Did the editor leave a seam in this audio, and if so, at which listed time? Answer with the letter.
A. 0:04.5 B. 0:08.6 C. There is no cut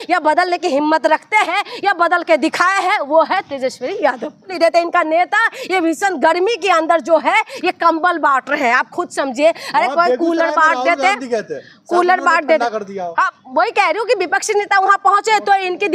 A